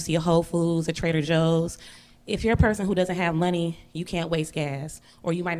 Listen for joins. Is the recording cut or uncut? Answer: uncut